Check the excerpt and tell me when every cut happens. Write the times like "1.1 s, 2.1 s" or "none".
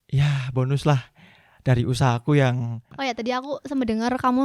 2.9 s